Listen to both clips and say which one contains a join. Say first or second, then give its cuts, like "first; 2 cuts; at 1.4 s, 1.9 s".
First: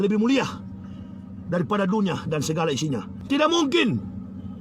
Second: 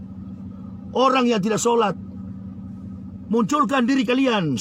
first; 1 cut; at 3.1 s